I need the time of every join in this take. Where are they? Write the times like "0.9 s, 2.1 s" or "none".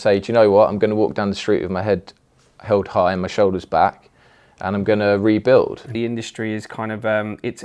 5.9 s